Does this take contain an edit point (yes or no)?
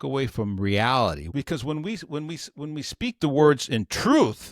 yes